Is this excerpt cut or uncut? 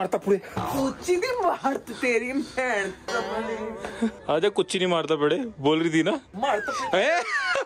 cut